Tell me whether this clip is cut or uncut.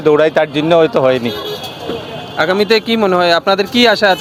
uncut